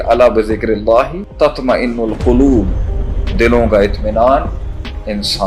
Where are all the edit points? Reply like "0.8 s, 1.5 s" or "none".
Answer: 1.2 s

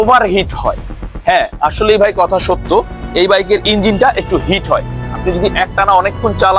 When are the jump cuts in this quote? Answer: none

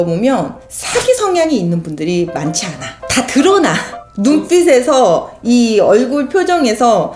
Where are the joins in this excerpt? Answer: none

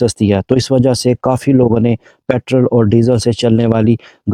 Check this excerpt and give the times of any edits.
none

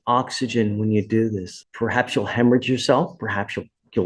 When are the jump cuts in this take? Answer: 1.5 s

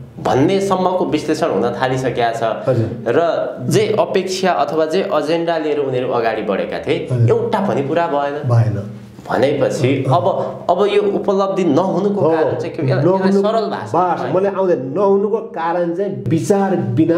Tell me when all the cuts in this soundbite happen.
16.3 s

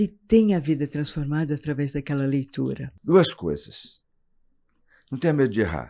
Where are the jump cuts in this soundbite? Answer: 2.9 s

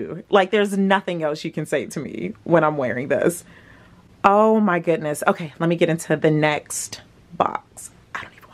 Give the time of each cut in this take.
none

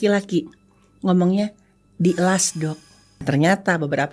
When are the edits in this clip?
3.2 s

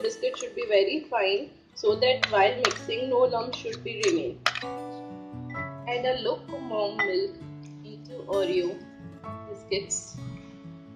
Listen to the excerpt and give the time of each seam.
4.6 s, 5.8 s

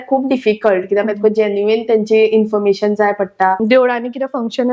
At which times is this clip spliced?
3.6 s

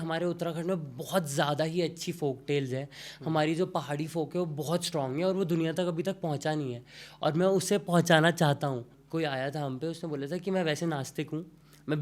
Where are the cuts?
9.0 s

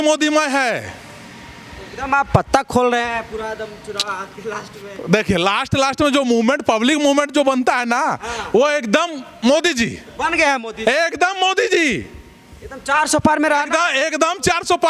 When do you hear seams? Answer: none

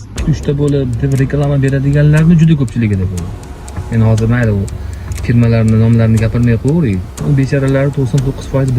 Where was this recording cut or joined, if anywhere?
7.1 s

